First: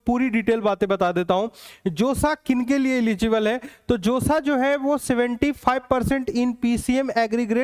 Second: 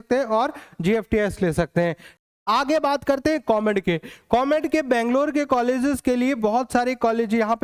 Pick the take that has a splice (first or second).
second